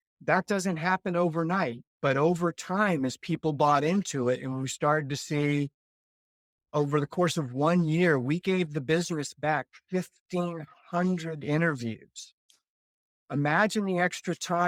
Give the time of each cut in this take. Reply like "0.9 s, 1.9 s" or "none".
none